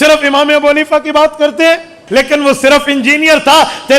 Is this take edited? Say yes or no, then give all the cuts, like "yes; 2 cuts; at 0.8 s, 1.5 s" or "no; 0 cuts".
yes; 1 cut; at 2.0 s